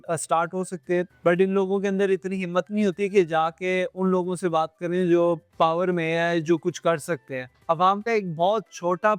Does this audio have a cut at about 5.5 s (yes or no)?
yes